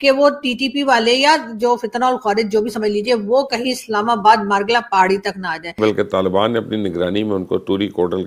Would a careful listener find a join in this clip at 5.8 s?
yes; 1 cut; at 5.8 s

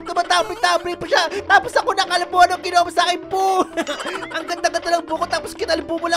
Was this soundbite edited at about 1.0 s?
no; 0 cuts

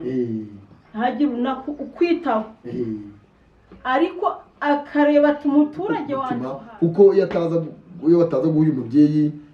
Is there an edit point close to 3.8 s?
no; 1 cut; at 6.2 s

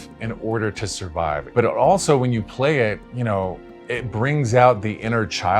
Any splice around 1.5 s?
yes; 1 cut; at 1.5 s

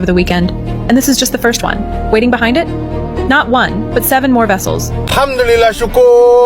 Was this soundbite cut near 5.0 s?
yes; 1 cut; at 5.0 s

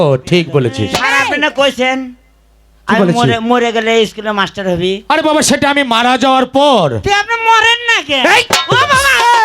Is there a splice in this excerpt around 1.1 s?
yes; 1 cut; at 1.1 s

